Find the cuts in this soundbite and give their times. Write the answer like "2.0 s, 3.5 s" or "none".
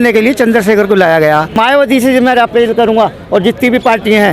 1.6 s